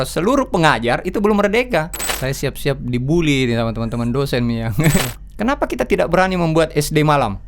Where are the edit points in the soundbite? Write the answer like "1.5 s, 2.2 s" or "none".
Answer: 2.2 s, 5.0 s